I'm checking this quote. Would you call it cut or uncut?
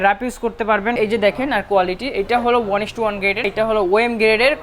cut